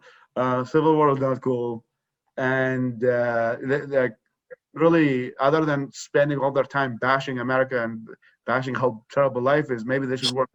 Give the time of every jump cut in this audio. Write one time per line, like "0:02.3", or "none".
none